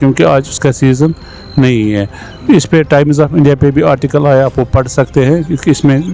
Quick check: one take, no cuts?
yes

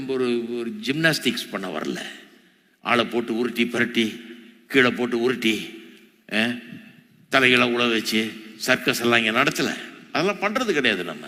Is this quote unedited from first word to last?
yes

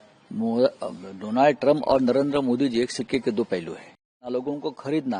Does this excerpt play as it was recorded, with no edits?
no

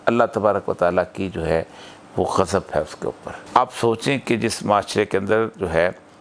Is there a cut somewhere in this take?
yes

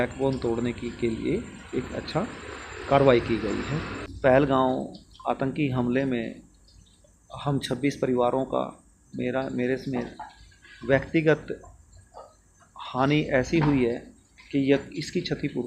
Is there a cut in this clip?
yes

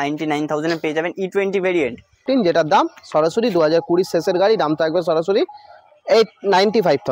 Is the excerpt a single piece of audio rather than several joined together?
no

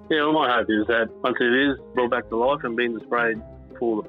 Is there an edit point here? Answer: yes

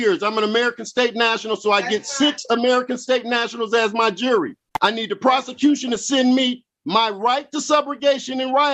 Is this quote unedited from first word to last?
yes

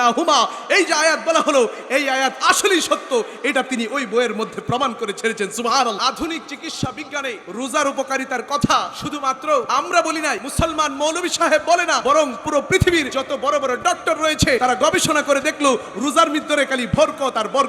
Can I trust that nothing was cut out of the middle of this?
no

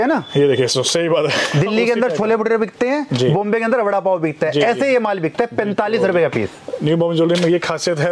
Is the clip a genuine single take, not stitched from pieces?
yes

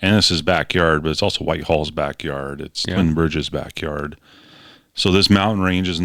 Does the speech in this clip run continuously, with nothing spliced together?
yes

